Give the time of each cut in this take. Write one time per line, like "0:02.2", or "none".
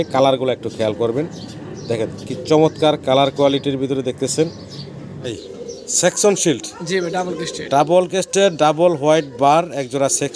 0:05.1

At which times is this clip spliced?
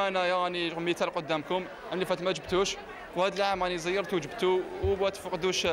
none

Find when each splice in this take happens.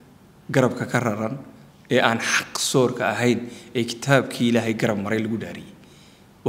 none

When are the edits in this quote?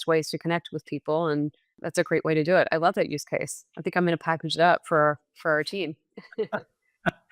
0:01.8

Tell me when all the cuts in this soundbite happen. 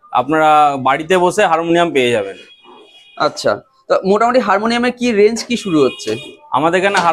none

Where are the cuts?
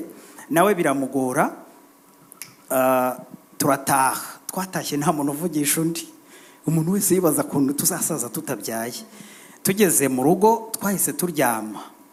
none

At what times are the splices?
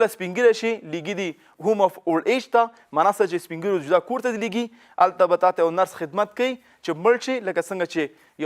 0:01.5

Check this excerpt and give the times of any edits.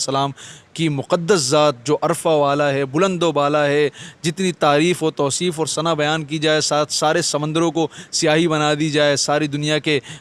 none

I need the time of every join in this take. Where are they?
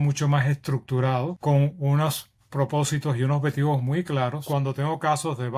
0:01.4
0:04.4

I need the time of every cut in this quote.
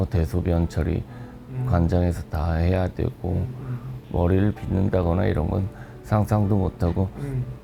none

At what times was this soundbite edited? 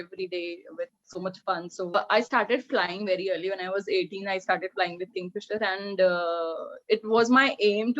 0:02.0

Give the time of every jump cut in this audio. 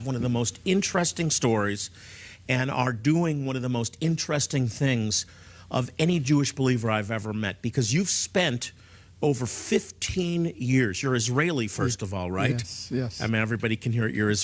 0:08.2

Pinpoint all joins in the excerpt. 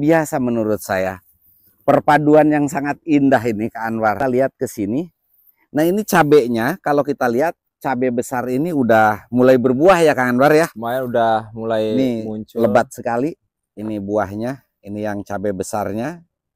0:04.2

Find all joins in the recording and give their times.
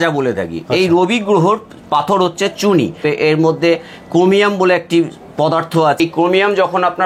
0:03.0
0:06.0

